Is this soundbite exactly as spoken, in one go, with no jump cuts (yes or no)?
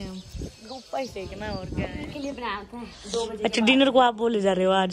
no